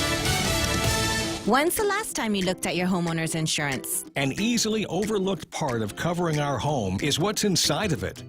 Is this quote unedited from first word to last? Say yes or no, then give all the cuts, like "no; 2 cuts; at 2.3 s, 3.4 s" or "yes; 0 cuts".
no; 1 cut; at 1.4 s